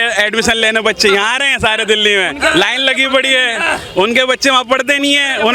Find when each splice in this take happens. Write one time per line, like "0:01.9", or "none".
none